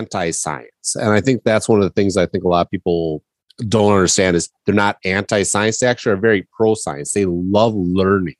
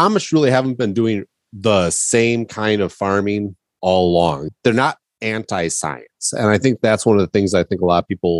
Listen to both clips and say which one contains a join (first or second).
second